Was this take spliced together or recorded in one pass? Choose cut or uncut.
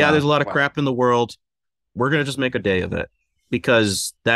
uncut